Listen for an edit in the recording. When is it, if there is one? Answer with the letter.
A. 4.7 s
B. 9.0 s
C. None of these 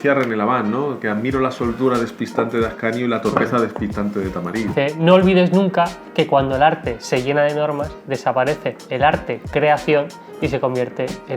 A